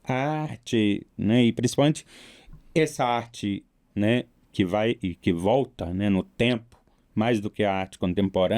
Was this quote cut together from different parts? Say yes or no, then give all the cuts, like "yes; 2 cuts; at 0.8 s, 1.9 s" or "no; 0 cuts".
no; 0 cuts